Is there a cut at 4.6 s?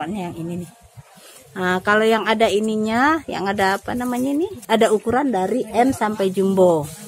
yes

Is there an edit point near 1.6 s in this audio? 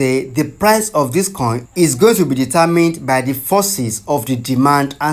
no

